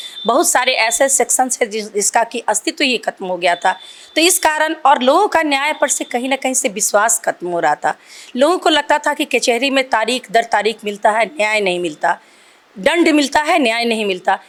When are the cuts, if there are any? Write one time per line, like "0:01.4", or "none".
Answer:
none